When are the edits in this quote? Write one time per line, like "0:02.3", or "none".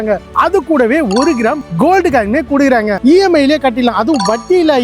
0:03.0